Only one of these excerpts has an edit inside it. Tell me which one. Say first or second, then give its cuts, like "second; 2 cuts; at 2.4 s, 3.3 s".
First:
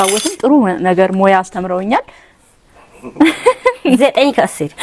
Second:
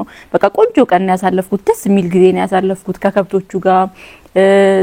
first; 1 cut; at 2.3 s